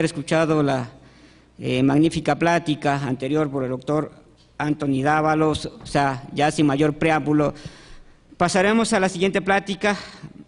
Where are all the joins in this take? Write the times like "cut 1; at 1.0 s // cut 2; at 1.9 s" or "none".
cut 1; at 9.3 s